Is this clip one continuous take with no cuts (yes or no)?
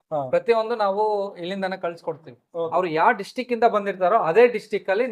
no